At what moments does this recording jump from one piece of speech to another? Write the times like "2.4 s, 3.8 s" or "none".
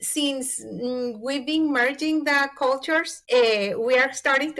3.1 s